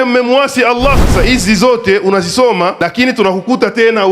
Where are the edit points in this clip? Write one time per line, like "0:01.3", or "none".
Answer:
0:01.0
0:02.8